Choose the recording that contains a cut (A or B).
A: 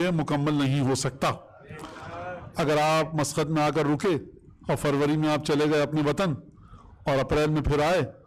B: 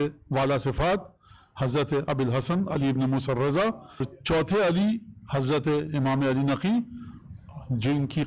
B